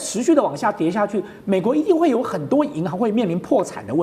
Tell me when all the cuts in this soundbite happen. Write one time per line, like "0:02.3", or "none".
none